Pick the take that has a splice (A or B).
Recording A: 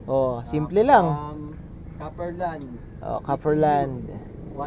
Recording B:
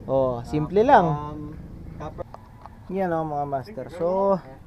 B